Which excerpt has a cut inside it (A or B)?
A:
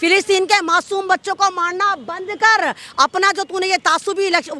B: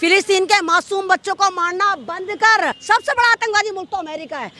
B